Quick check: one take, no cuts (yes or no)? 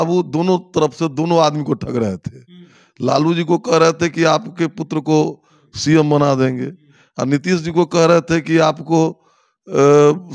yes